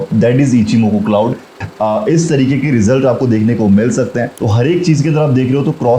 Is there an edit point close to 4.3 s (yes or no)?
yes